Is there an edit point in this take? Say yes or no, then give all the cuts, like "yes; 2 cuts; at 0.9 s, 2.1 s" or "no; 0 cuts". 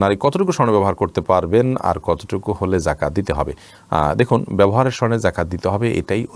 no; 0 cuts